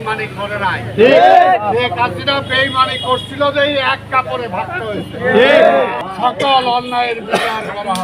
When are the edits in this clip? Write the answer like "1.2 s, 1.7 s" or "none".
6.0 s